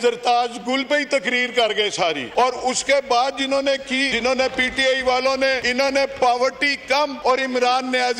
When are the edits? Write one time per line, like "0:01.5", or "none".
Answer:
0:02.2
0:04.1
0:05.6
0:07.2